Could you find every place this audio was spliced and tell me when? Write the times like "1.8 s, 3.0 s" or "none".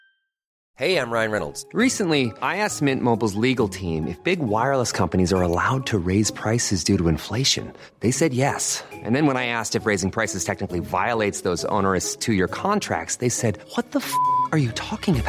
none